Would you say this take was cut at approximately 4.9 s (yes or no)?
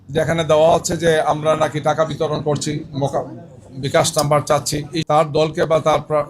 yes